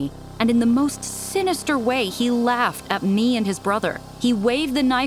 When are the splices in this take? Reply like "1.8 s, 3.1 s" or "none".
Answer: 4.0 s